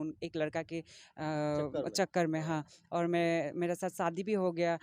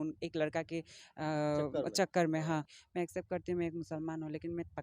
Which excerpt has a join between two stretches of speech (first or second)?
second